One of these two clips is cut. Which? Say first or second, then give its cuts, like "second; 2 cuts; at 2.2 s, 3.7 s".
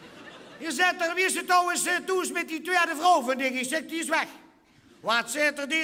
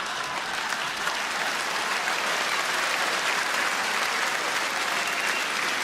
second; 1 cut; at 2.3 s